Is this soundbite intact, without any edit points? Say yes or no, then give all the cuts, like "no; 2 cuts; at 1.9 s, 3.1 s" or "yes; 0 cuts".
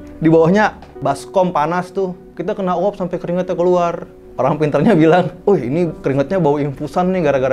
no; 2 cuts; at 2.2 s, 4.3 s